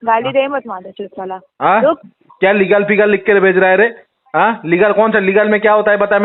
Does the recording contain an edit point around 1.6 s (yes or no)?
no